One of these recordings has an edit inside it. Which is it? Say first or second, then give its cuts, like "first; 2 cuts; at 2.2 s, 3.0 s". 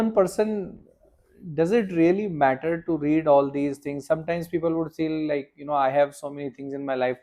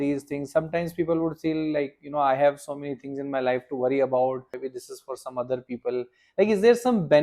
second; 1 cut; at 4.6 s